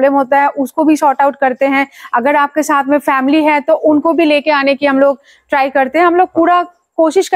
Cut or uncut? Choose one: uncut